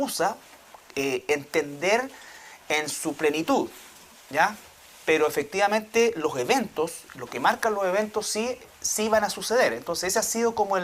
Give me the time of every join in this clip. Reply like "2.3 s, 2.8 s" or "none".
8.8 s